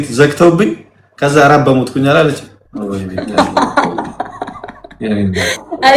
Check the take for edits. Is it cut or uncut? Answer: uncut